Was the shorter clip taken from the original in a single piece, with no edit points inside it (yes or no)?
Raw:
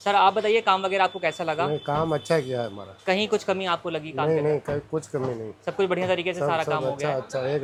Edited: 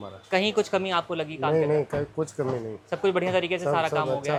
yes